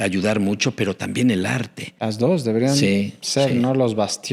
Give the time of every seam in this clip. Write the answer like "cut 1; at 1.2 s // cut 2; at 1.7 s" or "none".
none